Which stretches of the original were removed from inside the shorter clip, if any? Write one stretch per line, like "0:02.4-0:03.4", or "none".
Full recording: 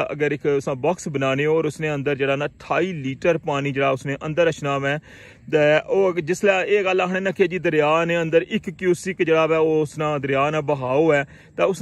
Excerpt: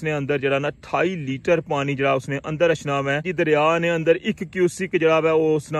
0:05.1-0:07.6

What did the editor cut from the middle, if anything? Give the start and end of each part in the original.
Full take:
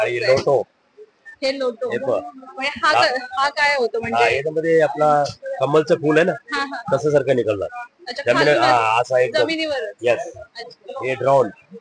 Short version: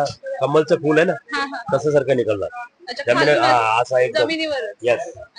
none

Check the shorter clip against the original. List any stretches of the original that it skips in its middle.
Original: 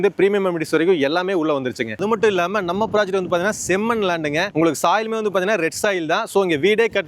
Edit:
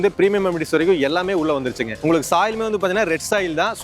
0:01.9-0:04.5

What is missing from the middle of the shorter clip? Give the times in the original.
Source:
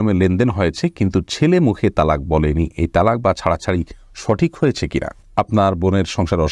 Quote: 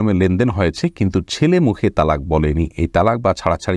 none

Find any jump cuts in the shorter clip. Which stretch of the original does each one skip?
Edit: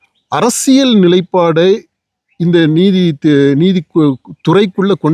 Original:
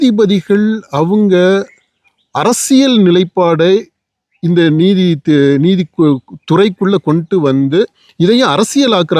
none

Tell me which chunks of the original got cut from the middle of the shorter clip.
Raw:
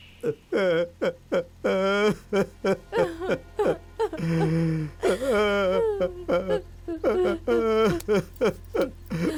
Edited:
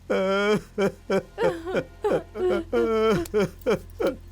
0:03.9-0:07.1

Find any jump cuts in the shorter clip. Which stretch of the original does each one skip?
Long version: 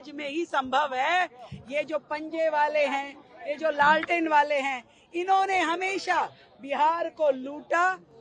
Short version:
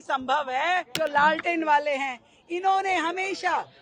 0:01.3-0:03.5

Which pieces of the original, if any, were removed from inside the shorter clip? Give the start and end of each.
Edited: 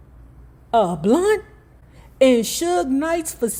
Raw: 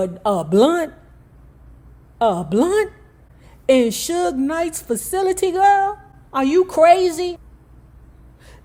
none

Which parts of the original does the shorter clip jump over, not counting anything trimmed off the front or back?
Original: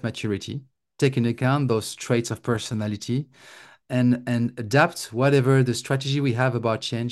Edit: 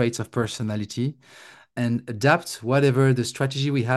0:03.8-0:04.2

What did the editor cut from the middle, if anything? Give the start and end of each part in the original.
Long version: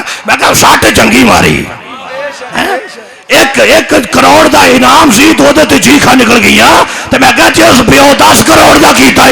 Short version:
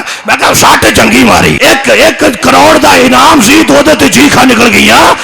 0:01.6-0:03.3

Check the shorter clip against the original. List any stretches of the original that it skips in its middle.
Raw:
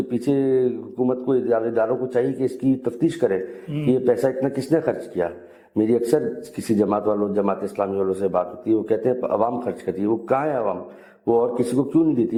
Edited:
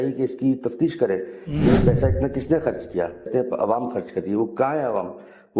0:05.5-0:09.0

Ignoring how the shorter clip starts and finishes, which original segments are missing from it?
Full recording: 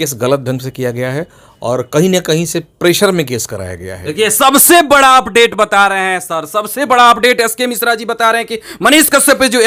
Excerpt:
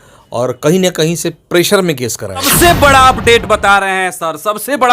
0:03.8-0:04.6

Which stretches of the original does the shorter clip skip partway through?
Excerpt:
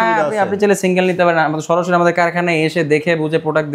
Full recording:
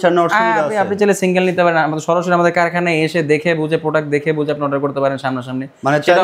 none

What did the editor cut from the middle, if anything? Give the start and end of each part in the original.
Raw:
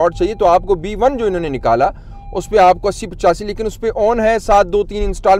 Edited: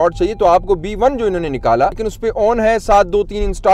0:02.1-0:03.7

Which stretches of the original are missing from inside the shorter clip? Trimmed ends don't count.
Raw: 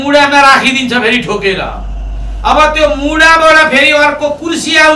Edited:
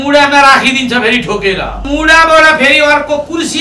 0:01.9-0:03.0

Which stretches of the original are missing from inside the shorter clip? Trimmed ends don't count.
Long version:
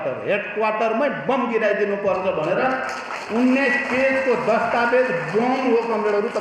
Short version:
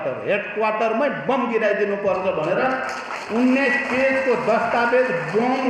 none

